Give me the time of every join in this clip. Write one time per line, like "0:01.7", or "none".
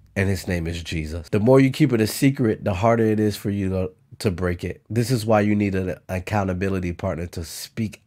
0:01.2